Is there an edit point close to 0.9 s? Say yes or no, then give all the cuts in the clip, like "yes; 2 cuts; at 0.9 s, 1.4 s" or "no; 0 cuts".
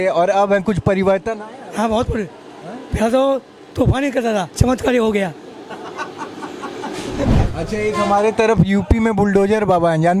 no; 2 cuts; at 4.5 s, 7.3 s